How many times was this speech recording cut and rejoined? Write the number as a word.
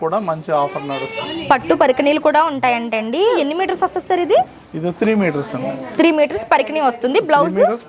two